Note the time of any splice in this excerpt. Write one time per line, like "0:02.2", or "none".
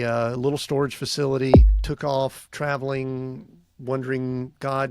0:01.7